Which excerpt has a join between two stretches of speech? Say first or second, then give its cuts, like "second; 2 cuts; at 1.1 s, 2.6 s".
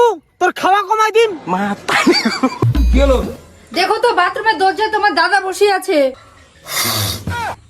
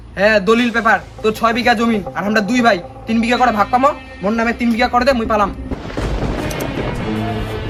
first; 1 cut; at 2.6 s